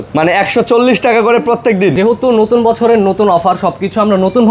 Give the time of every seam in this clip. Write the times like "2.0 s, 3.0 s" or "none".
2.0 s